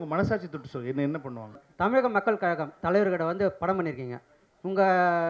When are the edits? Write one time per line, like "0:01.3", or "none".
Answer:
0:01.6